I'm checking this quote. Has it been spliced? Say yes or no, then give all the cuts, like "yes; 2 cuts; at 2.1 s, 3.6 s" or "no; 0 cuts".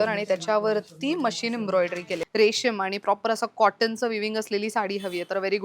yes; 1 cut; at 2.2 s